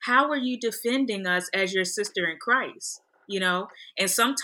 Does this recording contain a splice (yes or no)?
no